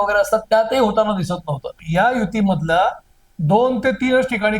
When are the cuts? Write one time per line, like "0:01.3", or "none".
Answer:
0:01.8